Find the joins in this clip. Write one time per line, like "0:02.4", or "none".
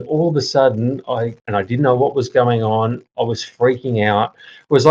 0:01.5